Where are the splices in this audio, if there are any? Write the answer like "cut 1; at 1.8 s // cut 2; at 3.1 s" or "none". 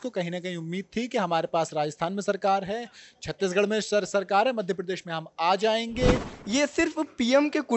cut 1; at 6.3 s